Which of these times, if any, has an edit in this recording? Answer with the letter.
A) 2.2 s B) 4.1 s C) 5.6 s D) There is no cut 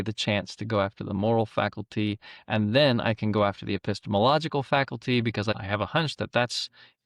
C